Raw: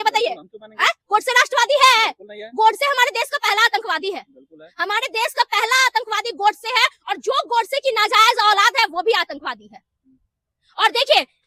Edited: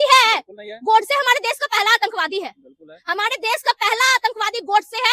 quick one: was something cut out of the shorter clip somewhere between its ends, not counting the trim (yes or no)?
no